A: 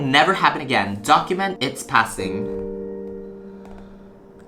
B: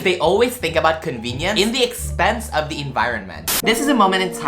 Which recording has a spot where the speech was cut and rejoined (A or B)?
B